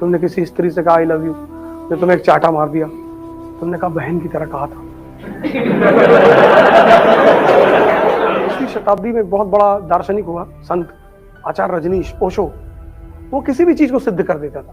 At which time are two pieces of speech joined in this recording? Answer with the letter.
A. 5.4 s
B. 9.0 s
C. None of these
B